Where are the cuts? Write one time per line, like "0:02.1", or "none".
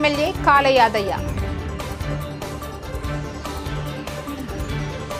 none